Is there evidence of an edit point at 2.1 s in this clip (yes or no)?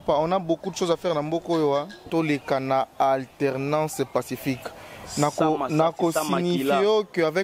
yes